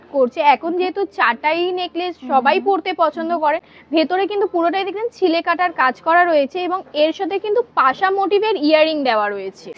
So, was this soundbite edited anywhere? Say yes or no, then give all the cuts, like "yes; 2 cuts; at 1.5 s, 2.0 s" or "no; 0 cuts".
no; 0 cuts